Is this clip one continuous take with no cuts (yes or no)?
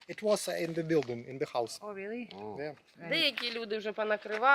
no